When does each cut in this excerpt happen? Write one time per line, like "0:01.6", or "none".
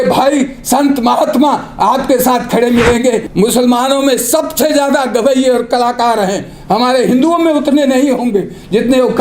0:03.3